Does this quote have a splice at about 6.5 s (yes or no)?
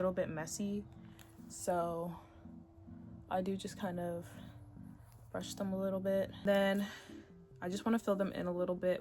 yes